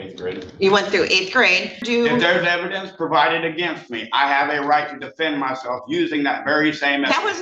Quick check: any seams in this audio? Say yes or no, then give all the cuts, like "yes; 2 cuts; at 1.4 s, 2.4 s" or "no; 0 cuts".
yes; 1 cut; at 1.8 s